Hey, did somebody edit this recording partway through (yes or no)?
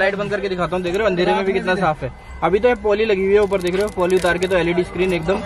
no